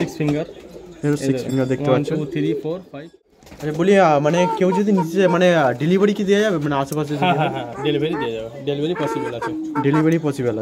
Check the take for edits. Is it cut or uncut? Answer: cut